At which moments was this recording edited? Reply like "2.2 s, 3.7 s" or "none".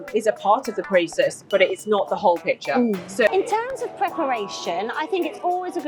3.3 s

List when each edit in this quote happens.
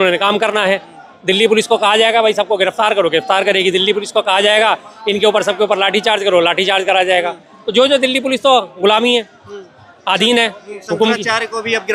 none

